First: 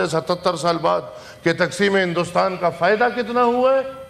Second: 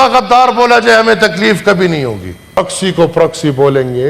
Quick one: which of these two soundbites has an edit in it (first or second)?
second